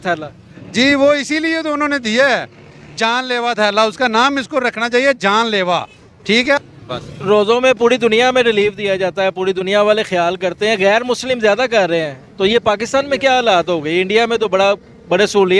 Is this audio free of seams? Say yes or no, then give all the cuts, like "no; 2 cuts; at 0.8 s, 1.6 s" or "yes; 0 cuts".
no; 1 cut; at 6.5 s